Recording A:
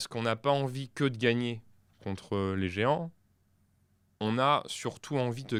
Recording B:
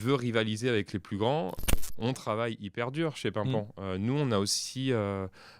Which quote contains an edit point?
B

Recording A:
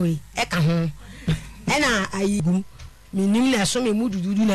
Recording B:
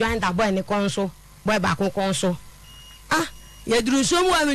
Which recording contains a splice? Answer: A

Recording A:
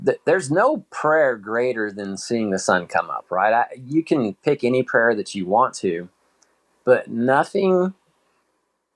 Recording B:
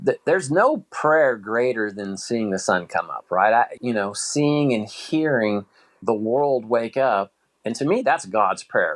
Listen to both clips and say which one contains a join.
B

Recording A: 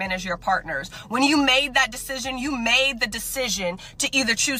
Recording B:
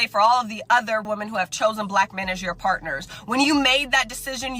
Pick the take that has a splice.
B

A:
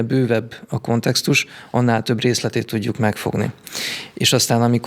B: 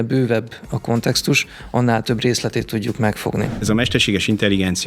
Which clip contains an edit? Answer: B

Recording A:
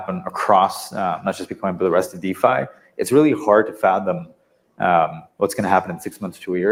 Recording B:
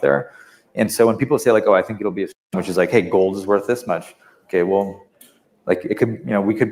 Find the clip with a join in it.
B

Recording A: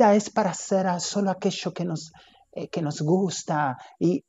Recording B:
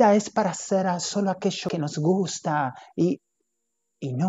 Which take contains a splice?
B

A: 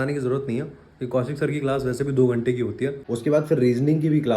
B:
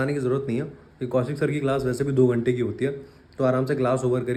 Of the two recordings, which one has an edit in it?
A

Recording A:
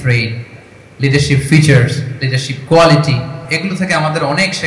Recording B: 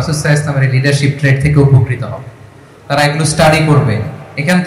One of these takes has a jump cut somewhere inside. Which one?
A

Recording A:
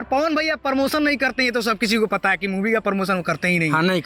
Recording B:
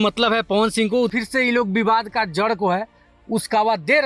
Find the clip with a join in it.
B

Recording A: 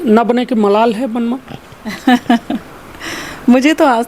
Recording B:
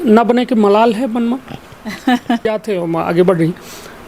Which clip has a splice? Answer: B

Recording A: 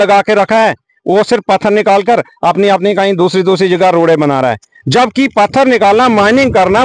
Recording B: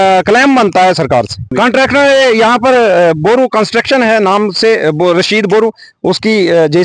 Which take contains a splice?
B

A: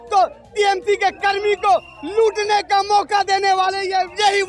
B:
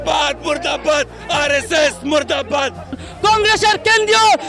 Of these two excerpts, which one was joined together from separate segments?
B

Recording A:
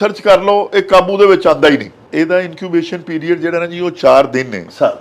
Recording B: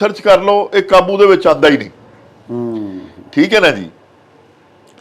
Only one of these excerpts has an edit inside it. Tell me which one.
A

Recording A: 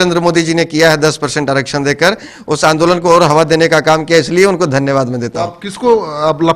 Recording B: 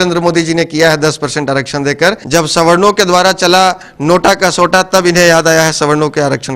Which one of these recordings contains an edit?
B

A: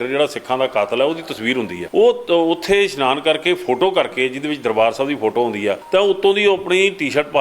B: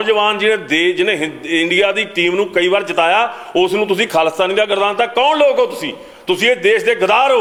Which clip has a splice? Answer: A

